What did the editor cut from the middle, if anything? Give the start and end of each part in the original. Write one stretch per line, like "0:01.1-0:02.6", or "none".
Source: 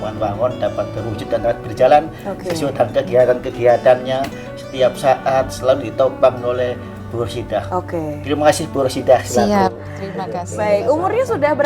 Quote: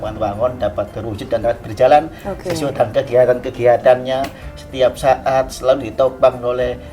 none